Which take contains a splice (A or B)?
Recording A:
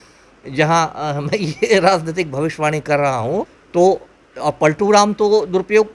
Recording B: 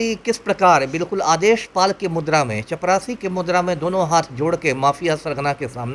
A